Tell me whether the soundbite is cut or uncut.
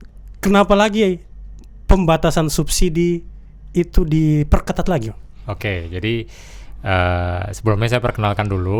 uncut